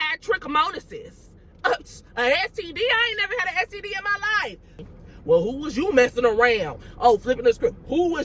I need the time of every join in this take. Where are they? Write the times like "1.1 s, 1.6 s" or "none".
4.9 s